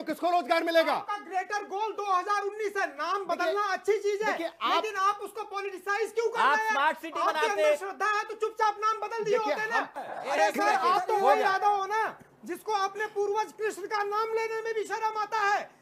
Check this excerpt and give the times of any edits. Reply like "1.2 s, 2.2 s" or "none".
9.9 s